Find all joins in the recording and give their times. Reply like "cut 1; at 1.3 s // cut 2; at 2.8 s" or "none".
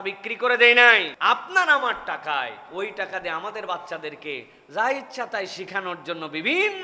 cut 1; at 1.1 s // cut 2; at 2.6 s